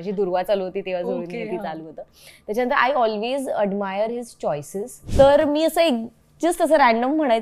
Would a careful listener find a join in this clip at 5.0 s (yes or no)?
yes